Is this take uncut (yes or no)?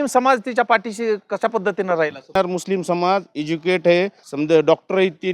no